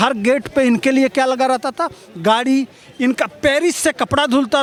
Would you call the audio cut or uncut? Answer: uncut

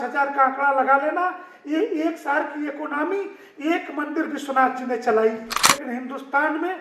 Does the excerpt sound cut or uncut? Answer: cut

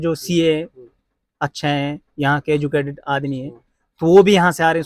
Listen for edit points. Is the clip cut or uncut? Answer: uncut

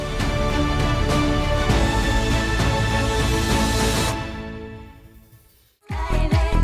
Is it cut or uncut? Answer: uncut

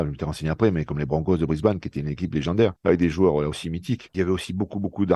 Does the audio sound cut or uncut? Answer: cut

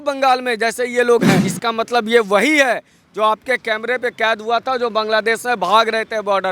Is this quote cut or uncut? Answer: cut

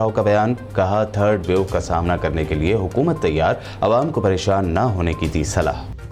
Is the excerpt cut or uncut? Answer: uncut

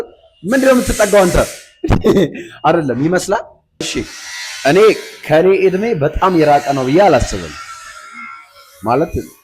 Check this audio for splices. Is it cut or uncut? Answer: cut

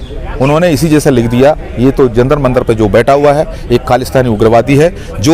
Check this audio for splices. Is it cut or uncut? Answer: uncut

